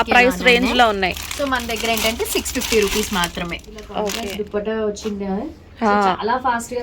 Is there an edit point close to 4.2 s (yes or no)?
yes